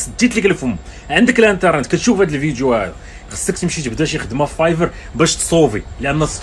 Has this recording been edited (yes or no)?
no